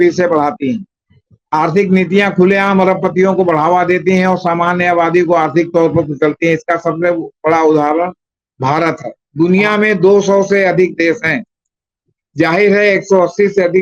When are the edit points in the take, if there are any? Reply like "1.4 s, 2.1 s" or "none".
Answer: 9.1 s